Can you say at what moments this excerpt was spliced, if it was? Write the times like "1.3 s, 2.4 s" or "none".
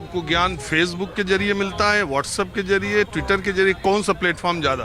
none